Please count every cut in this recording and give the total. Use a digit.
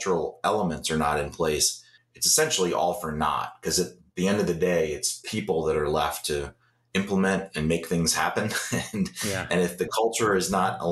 0